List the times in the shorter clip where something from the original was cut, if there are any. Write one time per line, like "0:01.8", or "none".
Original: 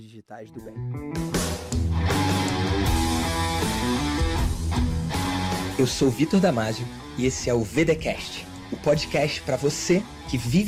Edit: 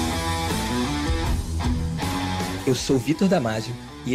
none